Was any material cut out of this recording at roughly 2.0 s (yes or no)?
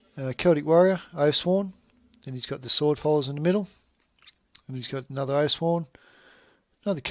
no